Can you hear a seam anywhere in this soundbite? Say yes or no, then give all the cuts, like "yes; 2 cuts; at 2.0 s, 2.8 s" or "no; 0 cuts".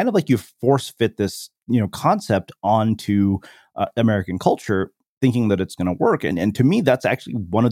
no; 0 cuts